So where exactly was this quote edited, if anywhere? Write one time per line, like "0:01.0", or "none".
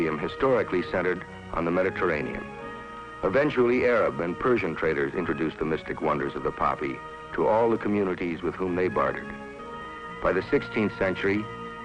none